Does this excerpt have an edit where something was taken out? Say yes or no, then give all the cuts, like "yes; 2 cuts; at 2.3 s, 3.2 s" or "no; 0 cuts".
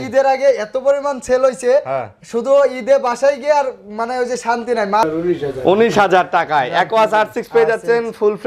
yes; 1 cut; at 5.0 s